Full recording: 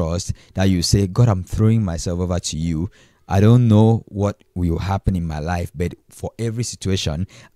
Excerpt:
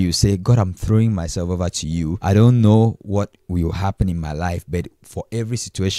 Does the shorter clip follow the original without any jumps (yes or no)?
no